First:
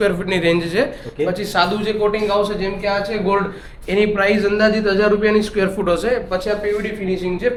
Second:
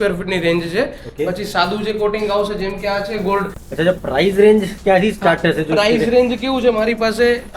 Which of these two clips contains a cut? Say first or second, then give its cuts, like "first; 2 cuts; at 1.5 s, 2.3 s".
second; 1 cut; at 3.6 s